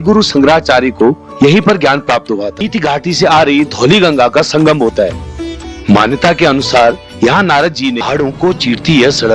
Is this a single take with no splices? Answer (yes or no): no